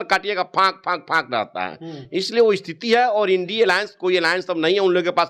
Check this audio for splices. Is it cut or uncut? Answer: uncut